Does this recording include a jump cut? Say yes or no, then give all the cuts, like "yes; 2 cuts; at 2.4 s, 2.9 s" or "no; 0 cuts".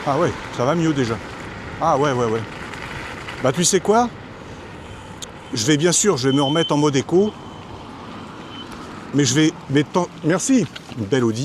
no; 0 cuts